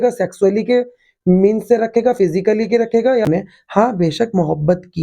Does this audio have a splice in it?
yes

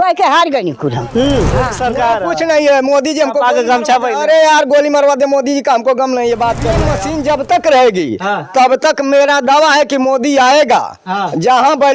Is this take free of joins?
no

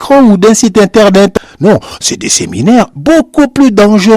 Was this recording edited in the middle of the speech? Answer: yes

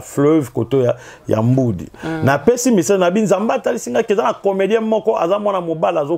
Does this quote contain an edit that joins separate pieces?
no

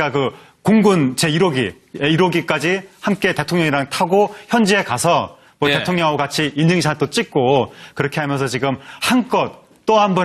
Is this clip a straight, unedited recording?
no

